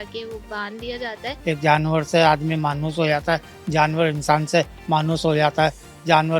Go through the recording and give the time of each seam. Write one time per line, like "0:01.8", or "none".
0:01.3